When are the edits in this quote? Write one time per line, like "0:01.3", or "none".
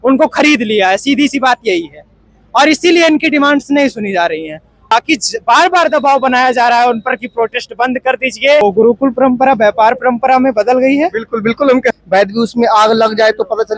0:04.9
0:08.6
0:12.0